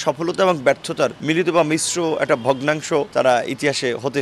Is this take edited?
yes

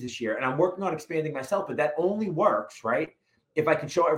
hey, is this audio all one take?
yes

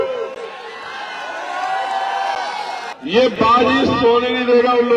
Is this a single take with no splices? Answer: no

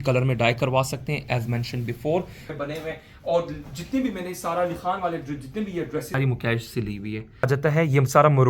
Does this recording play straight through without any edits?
no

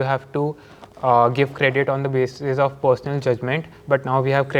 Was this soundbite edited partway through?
no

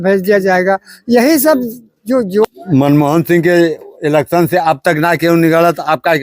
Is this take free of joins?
no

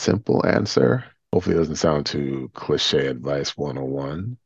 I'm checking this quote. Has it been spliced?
yes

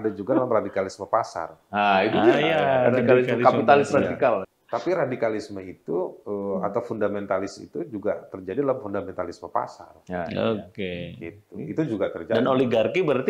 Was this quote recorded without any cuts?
no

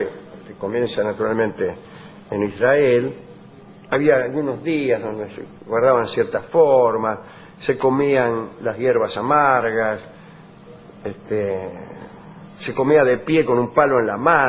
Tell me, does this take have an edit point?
yes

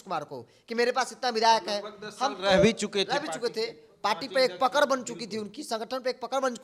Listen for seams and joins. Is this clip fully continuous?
yes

